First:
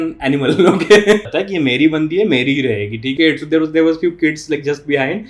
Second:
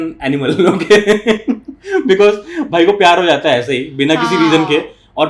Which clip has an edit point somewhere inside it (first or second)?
first